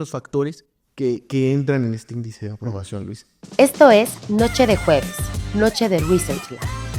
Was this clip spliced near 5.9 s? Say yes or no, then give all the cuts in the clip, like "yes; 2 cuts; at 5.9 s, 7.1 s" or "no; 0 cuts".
no; 1 cut; at 3.5 s